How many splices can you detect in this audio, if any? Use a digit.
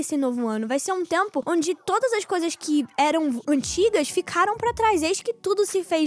1